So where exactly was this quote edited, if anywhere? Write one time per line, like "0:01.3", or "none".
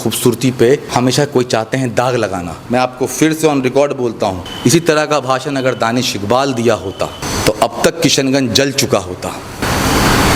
0:00.9
0:02.5
0:04.5
0:07.2
0:09.6